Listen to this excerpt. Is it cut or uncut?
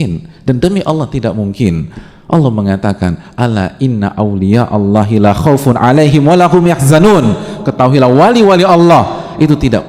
uncut